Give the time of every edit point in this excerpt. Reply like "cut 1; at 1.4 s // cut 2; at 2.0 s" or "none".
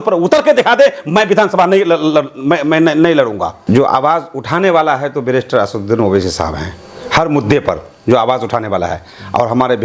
cut 1; at 3.5 s

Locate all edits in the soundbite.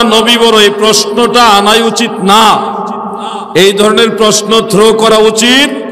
none

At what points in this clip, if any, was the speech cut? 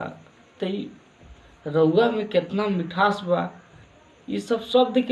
none

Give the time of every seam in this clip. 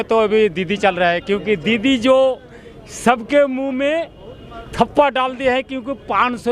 none

